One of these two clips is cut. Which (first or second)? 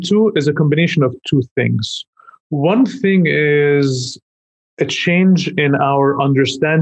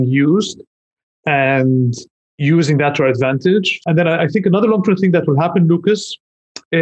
second